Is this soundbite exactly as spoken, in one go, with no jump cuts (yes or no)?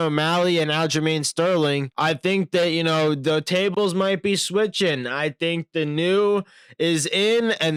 yes